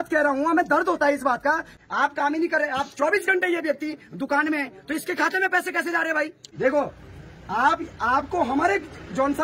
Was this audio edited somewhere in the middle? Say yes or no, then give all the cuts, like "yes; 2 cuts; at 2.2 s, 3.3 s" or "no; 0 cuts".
yes; 2 cuts; at 1.7 s, 6.4 s